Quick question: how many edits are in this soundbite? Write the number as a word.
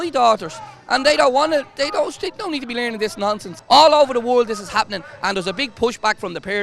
one